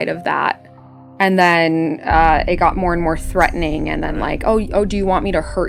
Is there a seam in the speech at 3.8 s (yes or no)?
no